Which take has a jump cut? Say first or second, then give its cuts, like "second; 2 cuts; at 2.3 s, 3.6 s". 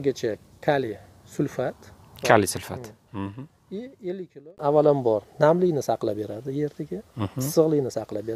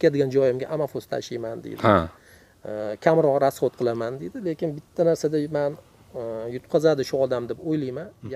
first; 1 cut; at 4.6 s